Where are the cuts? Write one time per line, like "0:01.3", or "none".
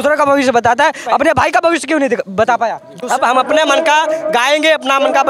0:02.9